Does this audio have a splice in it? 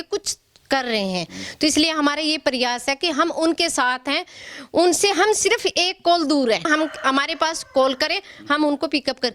yes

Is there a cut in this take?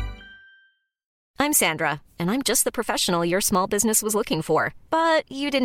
yes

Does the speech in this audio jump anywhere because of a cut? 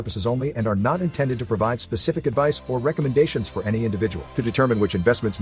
no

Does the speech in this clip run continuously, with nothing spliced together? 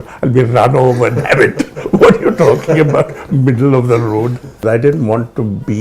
no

